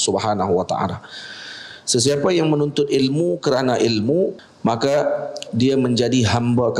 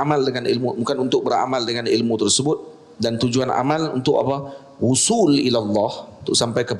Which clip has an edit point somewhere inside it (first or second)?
first